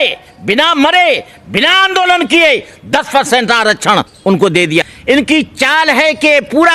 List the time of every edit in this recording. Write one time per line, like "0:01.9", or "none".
0:04.9